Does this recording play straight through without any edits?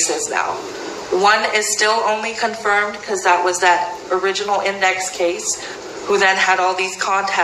yes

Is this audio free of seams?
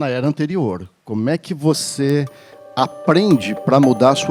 yes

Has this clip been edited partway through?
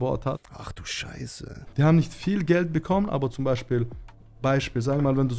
no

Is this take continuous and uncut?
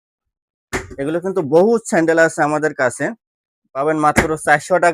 yes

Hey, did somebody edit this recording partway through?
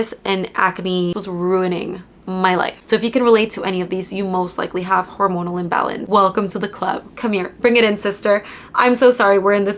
yes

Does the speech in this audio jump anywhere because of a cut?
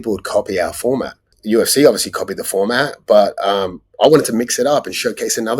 yes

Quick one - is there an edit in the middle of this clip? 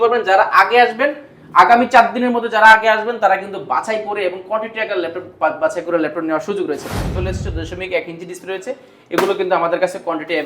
yes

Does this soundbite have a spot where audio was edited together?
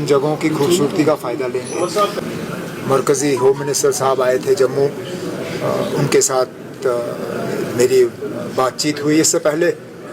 yes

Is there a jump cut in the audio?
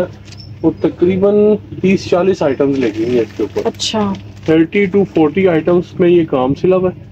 no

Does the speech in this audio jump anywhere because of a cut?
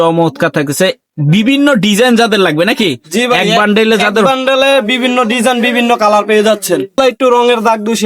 yes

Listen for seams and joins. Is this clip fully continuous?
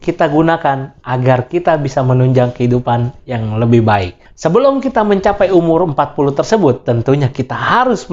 no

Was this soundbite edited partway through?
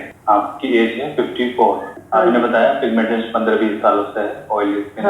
yes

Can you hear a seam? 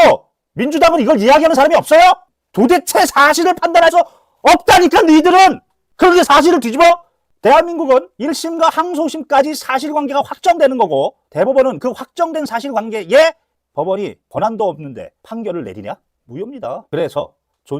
yes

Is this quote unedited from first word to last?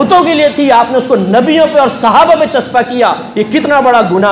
yes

